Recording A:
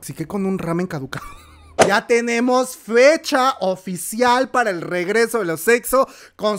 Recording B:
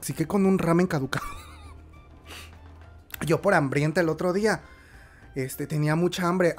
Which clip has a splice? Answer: A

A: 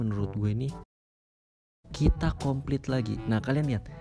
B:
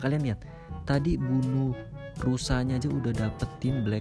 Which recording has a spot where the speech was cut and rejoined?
A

